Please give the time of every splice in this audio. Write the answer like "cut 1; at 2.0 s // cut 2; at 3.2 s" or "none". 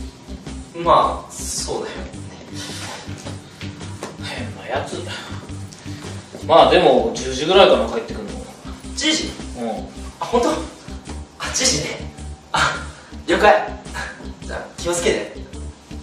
cut 1; at 11.0 s